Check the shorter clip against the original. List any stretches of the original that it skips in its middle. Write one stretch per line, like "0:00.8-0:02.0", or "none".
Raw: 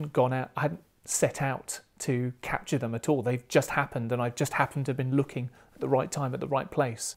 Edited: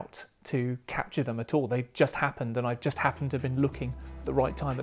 none